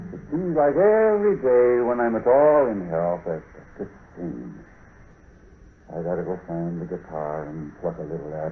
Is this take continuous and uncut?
no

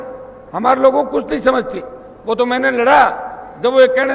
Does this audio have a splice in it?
no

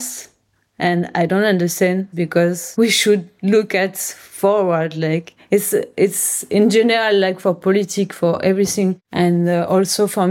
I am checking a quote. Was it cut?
yes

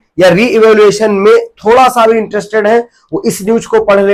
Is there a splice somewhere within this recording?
no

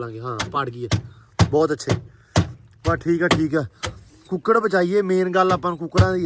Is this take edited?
no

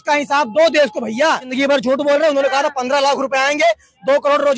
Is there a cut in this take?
yes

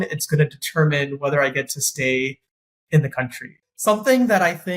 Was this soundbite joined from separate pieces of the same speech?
yes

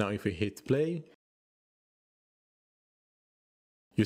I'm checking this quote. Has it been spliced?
no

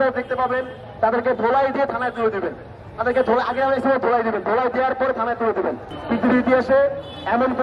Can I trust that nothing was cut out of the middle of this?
no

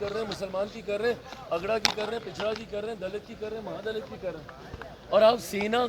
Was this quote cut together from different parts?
no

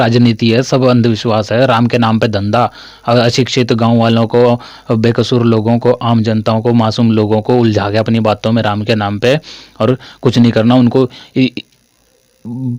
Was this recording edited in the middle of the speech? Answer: no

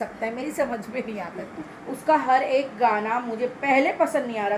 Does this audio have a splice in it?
yes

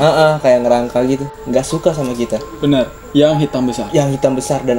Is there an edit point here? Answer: yes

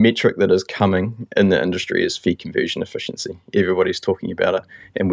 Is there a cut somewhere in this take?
no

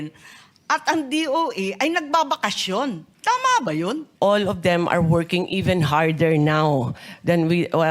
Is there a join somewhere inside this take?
yes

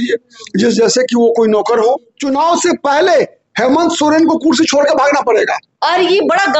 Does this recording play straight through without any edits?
no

